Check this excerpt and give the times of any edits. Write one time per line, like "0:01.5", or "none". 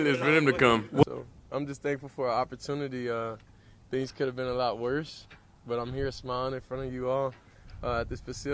0:01.0

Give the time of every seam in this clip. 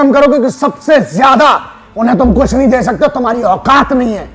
none

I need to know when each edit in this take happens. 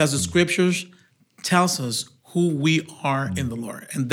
none

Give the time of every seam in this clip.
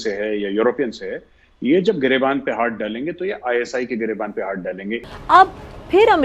0:05.0

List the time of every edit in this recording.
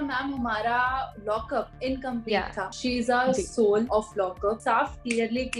0:01.4
0:02.7
0:04.4

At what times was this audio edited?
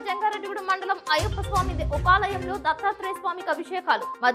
none

